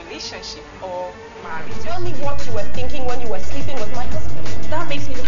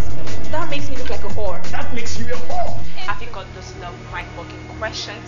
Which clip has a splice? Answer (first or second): second